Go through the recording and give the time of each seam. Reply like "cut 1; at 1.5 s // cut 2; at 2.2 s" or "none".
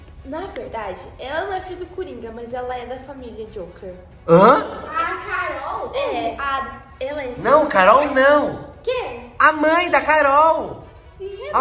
none